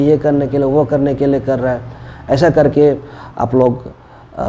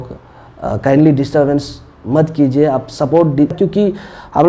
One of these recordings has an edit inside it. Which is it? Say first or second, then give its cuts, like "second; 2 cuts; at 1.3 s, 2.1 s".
second; 1 cut; at 3.5 s